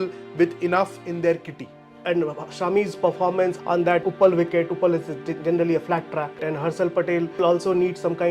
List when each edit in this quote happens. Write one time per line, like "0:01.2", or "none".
0:01.9
0:03.7
0:06.4
0:07.4